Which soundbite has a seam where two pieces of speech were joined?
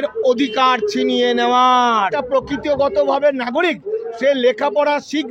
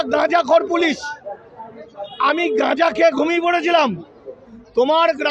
first; 1 cut; at 2.2 s

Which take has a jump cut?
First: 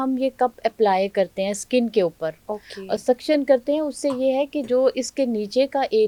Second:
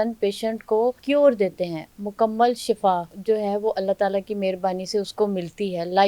second; 1 cut; at 1.0 s

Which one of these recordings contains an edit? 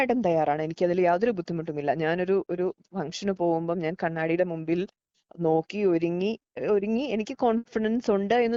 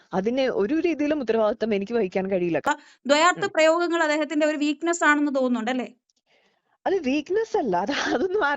second; 1 cut; at 2.7 s

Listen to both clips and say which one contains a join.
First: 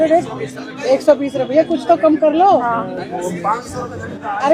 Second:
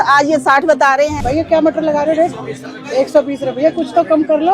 second; 1 cut; at 1.1 s

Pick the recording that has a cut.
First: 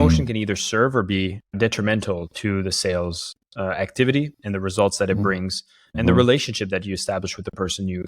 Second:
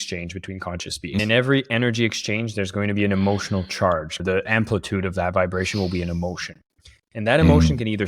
second; 2 cuts; at 1.2 s, 4.2 s

